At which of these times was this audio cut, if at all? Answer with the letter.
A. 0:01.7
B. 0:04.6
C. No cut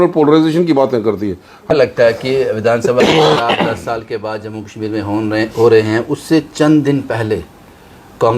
A